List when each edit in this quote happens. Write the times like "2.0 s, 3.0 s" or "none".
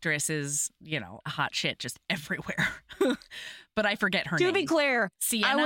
1.1 s

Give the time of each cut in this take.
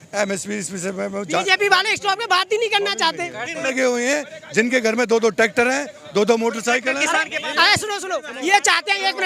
3.7 s

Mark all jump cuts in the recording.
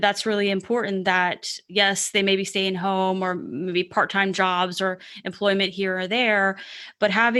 none

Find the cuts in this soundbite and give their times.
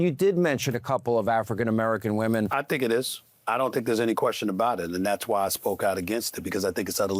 2.5 s

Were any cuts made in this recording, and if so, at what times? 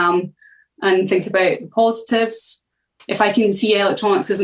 3.0 s

